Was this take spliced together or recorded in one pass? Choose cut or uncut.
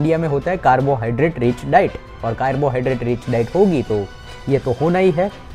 uncut